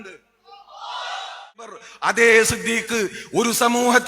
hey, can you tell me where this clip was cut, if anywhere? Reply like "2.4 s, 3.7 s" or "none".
1.8 s